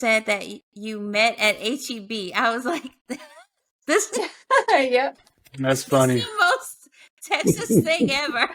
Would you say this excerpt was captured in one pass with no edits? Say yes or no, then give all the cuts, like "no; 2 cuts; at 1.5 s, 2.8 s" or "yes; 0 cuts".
yes; 0 cuts